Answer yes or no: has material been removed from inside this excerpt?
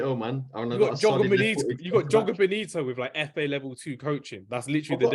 no